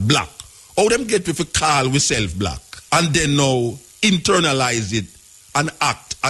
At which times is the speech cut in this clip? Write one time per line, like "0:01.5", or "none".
0:02.7